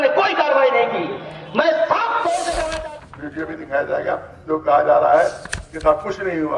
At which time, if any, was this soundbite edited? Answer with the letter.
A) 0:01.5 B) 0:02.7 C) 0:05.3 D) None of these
B